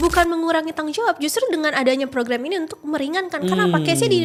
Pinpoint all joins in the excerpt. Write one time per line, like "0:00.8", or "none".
none